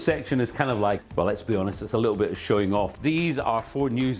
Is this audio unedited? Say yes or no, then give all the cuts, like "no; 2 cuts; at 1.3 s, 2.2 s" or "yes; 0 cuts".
no; 2 cuts; at 1.0 s, 2.9 s